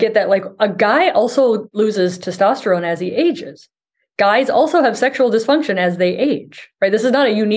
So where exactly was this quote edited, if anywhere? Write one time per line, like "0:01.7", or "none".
0:01.7